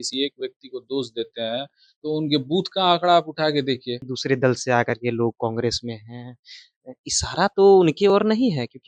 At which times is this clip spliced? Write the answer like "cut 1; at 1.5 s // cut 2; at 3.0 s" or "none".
cut 1; at 4.1 s